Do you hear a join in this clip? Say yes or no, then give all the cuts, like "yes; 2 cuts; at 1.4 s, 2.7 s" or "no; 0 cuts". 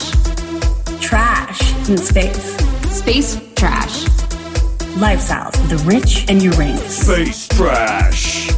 no; 0 cuts